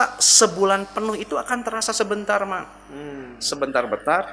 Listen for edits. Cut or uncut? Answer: uncut